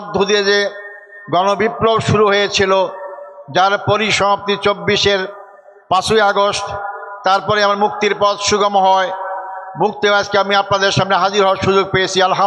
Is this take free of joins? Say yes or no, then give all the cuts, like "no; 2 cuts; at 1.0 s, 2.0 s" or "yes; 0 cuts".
yes; 0 cuts